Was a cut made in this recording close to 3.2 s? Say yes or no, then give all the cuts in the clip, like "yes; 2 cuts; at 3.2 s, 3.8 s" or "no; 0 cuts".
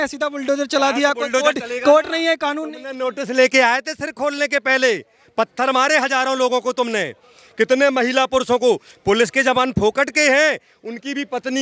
no; 0 cuts